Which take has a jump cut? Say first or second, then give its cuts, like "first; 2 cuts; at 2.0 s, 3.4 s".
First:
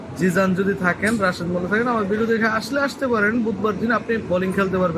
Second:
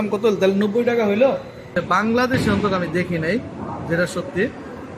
second; 1 cut; at 1.7 s